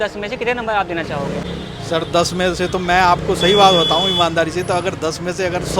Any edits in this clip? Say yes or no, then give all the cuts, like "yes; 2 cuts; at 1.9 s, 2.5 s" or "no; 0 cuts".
yes; 1 cut; at 1.5 s